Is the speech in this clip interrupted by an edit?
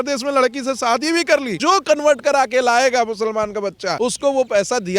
yes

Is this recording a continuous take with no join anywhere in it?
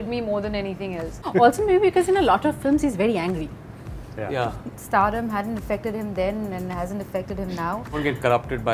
no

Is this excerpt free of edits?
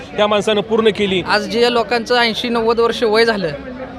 no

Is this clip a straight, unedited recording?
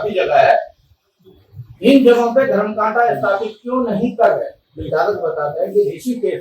no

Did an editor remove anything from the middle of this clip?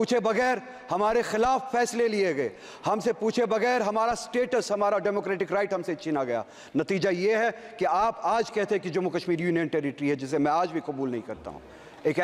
no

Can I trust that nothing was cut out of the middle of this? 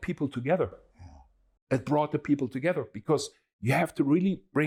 yes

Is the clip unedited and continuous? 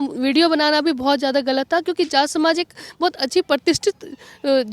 yes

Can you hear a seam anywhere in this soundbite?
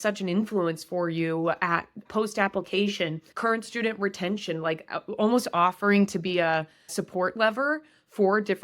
yes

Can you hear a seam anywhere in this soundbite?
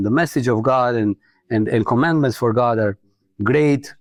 no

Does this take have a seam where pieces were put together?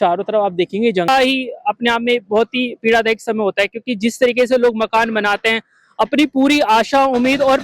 yes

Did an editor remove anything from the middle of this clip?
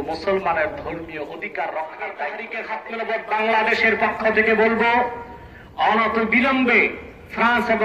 yes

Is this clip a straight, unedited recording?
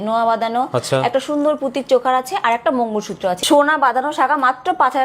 no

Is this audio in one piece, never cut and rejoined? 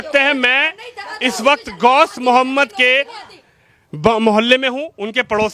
yes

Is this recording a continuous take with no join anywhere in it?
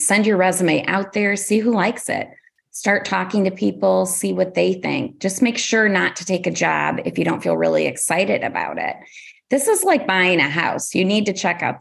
yes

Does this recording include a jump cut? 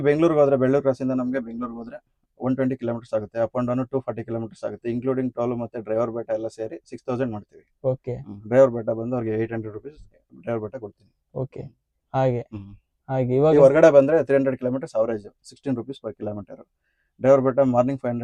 no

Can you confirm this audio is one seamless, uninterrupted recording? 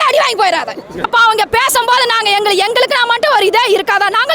no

